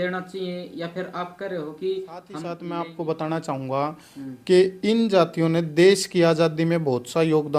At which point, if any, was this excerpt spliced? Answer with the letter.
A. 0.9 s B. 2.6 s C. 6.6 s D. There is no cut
B